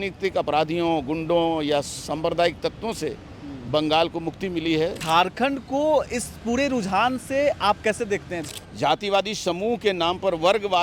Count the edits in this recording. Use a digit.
2